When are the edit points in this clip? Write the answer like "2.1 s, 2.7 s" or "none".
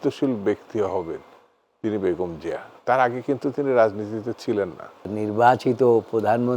5.1 s